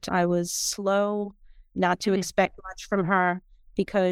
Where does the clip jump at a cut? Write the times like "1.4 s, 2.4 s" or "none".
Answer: none